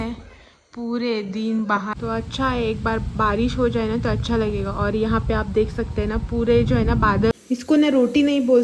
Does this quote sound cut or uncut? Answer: cut